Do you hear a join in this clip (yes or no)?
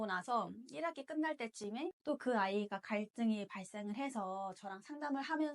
yes